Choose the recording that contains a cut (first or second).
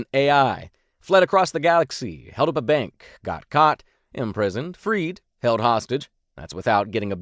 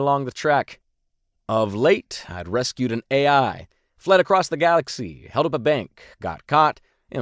first